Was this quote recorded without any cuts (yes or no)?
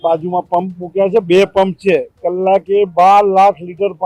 yes